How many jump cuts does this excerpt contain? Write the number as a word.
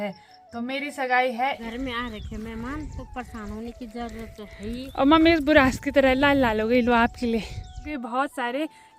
two